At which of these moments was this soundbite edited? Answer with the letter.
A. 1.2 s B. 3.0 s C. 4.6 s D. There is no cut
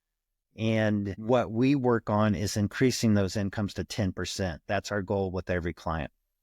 A